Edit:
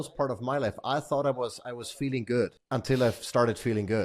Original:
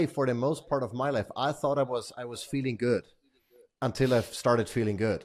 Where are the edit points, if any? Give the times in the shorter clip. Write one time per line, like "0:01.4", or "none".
0:02.6